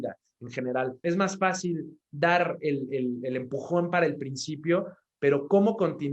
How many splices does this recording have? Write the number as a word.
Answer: one